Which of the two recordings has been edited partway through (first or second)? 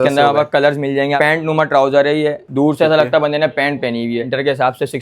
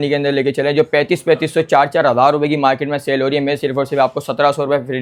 first